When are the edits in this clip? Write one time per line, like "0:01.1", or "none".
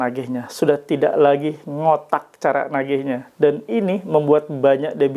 none